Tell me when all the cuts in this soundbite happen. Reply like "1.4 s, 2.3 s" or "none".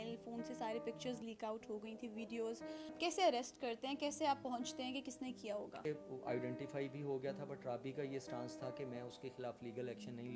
3.0 s, 5.8 s